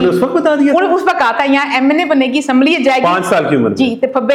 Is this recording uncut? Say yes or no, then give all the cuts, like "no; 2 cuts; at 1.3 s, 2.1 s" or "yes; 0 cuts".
yes; 0 cuts